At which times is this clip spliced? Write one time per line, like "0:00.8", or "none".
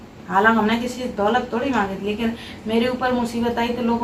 none